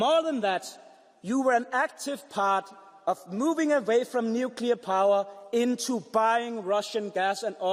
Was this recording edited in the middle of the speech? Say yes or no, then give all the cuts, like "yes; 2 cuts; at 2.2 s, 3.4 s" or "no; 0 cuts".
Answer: no; 0 cuts